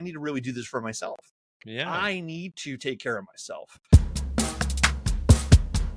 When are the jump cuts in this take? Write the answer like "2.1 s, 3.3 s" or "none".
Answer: 3.7 s